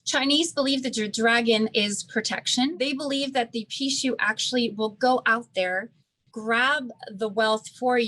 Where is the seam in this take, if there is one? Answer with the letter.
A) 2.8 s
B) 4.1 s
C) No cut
A